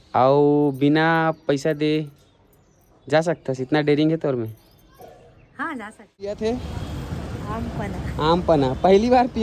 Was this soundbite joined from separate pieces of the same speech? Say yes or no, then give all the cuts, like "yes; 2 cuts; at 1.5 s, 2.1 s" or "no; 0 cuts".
yes; 1 cut; at 6.4 s